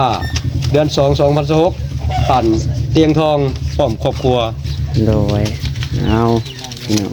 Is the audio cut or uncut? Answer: uncut